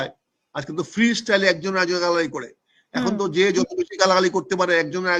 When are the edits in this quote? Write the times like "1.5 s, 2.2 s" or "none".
none